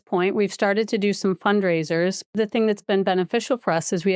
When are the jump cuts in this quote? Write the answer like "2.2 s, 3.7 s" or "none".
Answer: 2.3 s